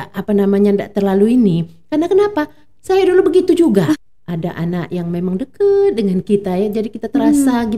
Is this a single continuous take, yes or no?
no